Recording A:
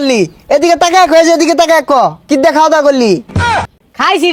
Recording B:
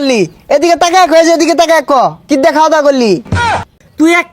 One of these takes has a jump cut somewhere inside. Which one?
B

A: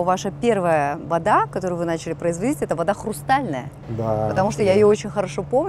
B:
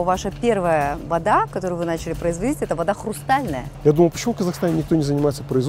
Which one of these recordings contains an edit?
B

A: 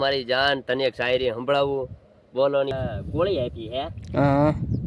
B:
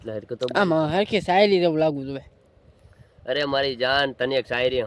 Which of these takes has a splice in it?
A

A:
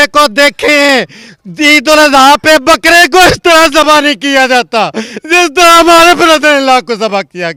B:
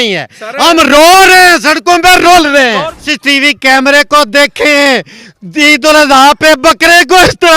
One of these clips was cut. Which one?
B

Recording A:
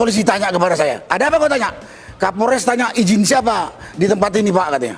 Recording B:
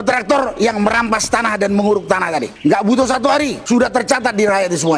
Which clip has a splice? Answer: B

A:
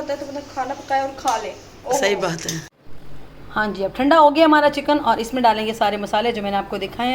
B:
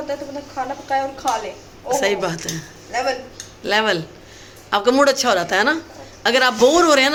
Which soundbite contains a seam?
A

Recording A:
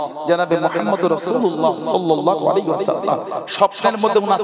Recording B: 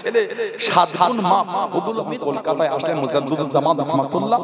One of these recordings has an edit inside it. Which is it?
B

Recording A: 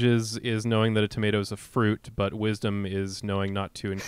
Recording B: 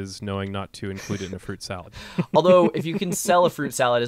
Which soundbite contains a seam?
B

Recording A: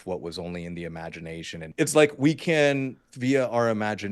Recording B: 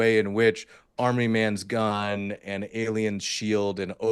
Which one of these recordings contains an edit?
A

